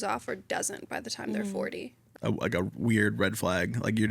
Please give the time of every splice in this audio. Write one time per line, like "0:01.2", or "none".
0:02.0

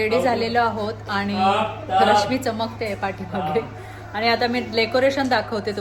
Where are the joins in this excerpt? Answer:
none

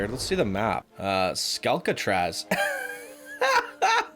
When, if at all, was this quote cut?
0:00.9

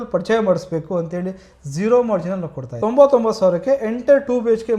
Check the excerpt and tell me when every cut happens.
0:02.7

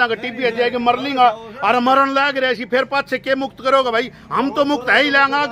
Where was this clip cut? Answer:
none

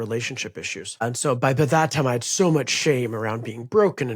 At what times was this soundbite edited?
0:01.0

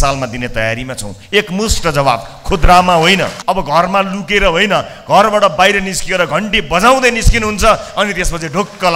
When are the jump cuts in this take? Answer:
0:03.4

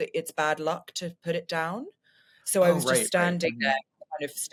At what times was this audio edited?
none

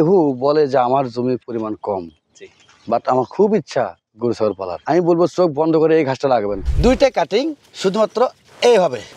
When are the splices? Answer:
0:04.7
0:06.6

